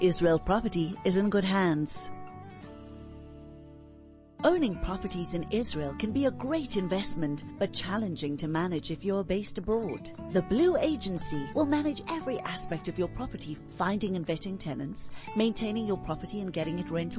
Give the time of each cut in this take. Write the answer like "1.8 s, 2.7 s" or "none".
1.9 s, 4.3 s